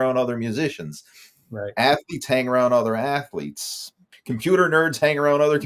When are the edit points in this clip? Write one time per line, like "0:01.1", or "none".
0:04.1